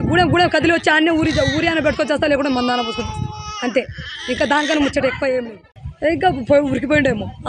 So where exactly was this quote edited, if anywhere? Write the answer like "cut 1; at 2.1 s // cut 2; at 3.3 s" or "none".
cut 1; at 5.8 s